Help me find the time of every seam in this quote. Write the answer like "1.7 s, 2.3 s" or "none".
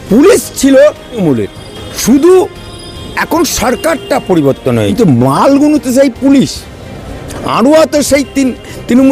1.2 s, 4.9 s

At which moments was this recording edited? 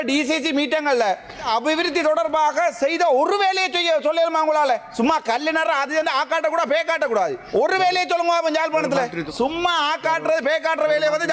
1.5 s, 7.4 s, 9.2 s

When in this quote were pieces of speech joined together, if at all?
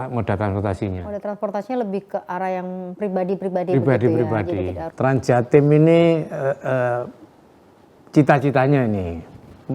4.8 s

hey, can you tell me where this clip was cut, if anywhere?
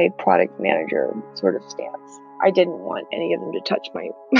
none

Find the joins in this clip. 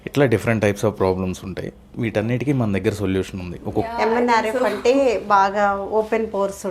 3.9 s

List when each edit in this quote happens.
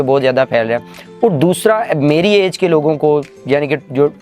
none

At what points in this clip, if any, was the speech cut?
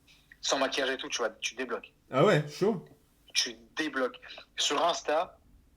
none

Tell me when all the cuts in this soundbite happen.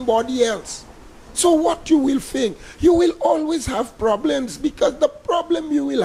none

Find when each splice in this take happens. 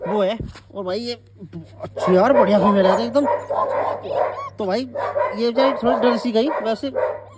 none

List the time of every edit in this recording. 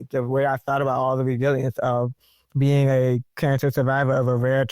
3.3 s

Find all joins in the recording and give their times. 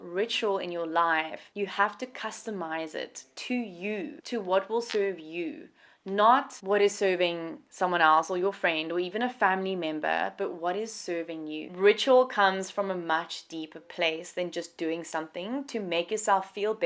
11.7 s

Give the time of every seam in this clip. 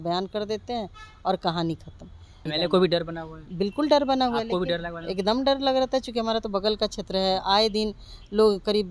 2.5 s

